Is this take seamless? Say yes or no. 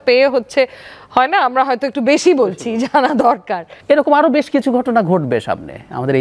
no